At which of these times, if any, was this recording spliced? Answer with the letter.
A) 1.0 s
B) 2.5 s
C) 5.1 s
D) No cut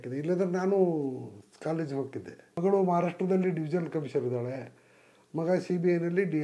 B